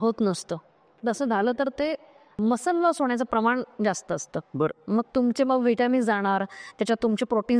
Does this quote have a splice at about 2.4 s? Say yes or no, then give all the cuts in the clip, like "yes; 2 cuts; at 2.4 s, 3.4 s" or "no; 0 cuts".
yes; 1 cut; at 2.4 s